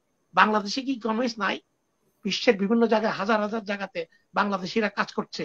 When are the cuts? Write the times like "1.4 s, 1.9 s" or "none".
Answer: none